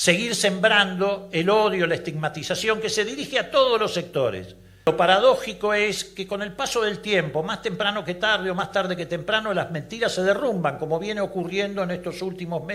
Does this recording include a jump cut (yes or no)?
yes